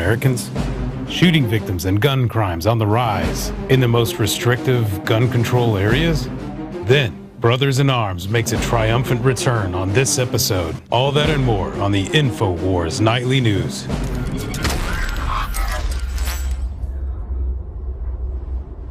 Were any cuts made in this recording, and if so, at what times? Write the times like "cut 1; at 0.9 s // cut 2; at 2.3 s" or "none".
none